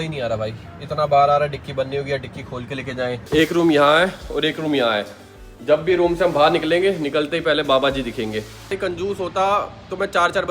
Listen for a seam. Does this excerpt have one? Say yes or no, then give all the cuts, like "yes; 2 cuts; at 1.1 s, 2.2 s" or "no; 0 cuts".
yes; 2 cuts; at 3.2 s, 8.8 s